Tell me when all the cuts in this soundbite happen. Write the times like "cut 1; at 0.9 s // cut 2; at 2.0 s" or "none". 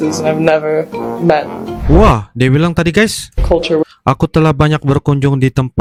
none

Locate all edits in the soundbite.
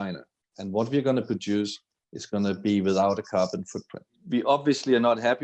cut 1; at 4.2 s

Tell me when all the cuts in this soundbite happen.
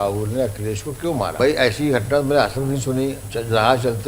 cut 1; at 1.4 s

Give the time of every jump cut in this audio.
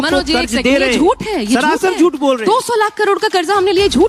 none

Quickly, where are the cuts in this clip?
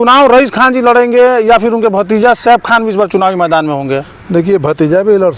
none

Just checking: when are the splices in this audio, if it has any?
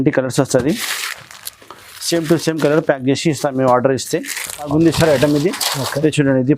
cut 1; at 4.7 s

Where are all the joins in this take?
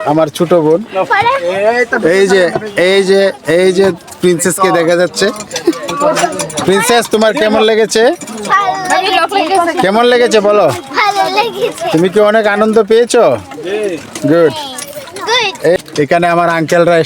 cut 1; at 15.8 s

